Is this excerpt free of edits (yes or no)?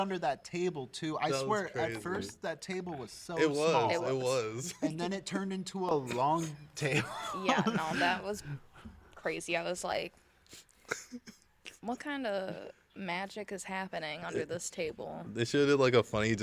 yes